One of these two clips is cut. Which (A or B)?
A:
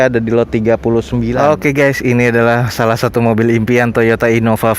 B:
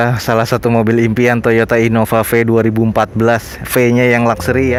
A